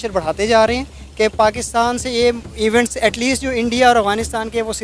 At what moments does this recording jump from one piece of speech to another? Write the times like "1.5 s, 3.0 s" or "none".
none